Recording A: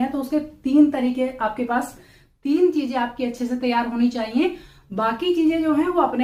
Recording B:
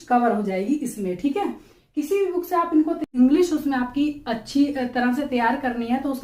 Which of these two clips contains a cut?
B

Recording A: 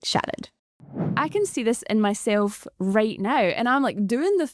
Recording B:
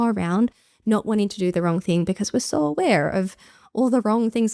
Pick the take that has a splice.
A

